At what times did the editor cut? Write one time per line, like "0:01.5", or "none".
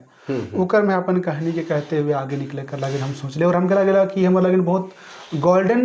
none